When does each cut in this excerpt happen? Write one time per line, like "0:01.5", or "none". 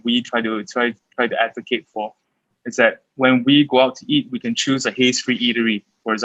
none